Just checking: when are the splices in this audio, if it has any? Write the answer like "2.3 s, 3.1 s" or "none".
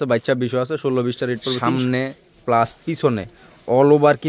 1.6 s